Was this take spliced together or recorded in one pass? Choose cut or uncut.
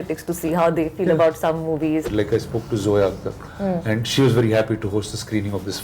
cut